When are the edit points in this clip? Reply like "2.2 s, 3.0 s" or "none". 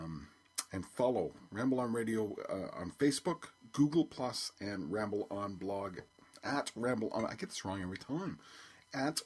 none